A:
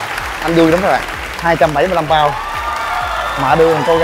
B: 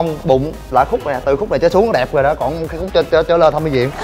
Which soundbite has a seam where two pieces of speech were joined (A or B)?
A